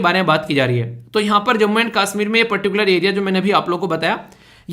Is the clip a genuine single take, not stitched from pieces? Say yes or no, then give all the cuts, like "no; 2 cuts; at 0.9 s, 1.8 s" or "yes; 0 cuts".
yes; 0 cuts